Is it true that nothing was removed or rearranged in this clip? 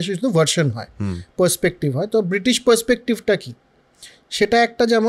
yes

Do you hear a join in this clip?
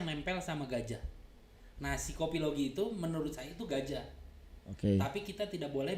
no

